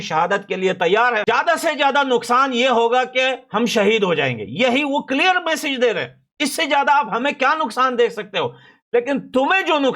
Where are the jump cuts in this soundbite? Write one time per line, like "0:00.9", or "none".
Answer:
0:01.2